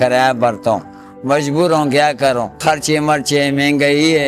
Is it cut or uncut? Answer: uncut